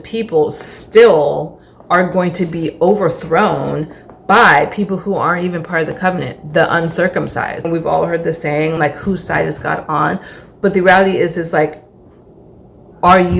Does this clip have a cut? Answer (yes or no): yes